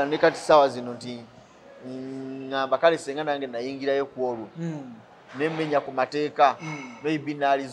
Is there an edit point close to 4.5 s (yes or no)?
no